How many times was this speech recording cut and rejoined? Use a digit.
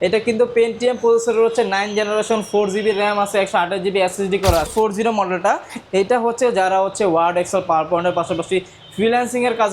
1